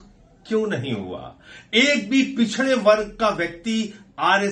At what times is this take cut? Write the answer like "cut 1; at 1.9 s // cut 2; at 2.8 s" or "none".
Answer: none